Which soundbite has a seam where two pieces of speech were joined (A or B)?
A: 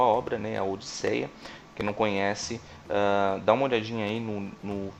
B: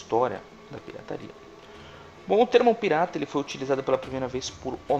B